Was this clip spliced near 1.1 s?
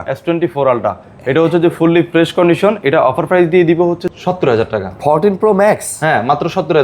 no; 1 cut; at 4.0 s

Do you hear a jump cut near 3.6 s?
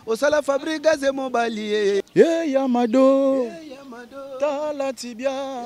no; 1 cut; at 2.1 s

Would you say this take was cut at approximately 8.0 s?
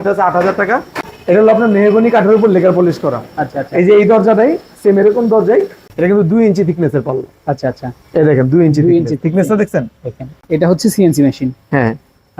no; 3 cuts; at 1.0 s, 5.8 s, 10.3 s

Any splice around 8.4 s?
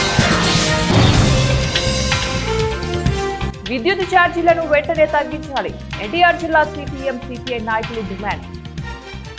yes; 1 cut; at 8.4 s

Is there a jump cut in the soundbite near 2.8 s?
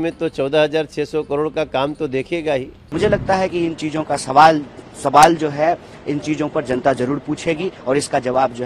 yes; 1 cut; at 2.8 s

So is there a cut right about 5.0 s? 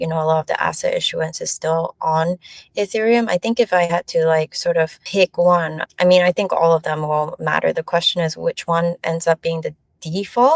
yes; 2 cuts; at 5.0 s, 5.8 s

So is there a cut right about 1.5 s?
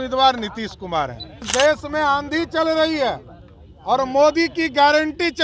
yes; 1 cut; at 1.5 s

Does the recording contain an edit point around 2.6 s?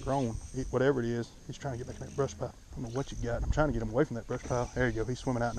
yes; 1 cut; at 2.6 s

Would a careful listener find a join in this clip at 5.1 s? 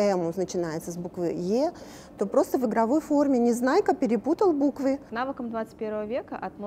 yes; 1 cut; at 5.1 s

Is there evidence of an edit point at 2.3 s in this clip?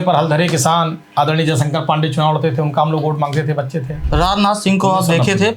no; 2 cuts; at 1.0 s, 4.0 s

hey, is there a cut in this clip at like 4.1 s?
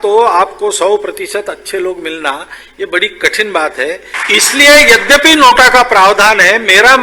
yes; 1 cut; at 4.1 s

